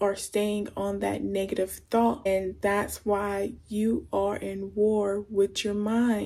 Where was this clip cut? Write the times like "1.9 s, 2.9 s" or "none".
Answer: 2.3 s